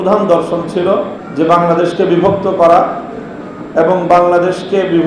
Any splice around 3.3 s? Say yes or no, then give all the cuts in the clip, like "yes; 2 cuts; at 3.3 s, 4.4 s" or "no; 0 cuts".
no; 1 cut; at 1.2 s